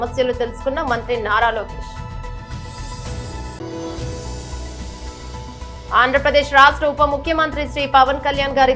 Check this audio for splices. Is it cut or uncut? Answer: uncut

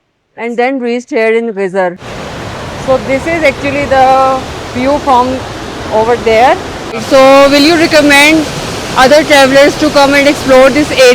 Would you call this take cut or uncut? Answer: cut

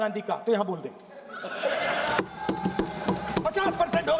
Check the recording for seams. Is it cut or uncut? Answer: uncut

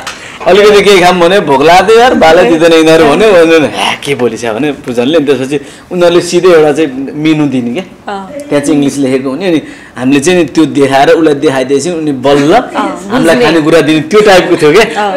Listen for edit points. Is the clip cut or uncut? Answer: uncut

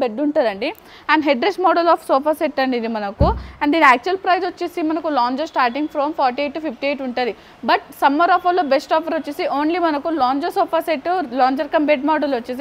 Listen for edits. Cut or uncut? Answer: uncut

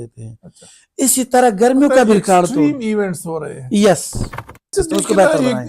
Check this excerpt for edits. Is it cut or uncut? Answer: cut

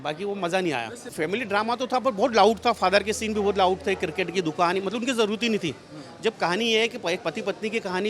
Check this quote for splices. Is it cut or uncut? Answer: cut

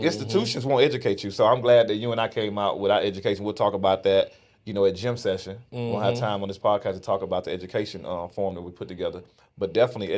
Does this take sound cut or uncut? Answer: uncut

